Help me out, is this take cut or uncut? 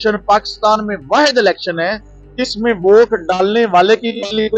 uncut